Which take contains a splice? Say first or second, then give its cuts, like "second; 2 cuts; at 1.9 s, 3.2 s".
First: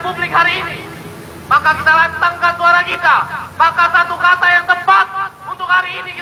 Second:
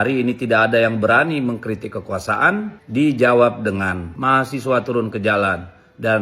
second; 2 cuts; at 2.8 s, 4.1 s